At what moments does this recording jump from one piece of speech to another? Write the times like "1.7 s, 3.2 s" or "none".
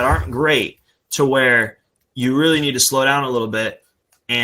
none